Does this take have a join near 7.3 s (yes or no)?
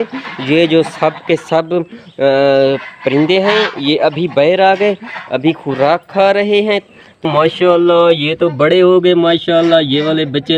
yes